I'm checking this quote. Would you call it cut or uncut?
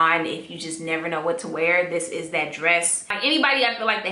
cut